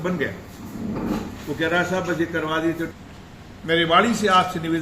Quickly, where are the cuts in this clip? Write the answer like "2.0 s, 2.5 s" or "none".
2.9 s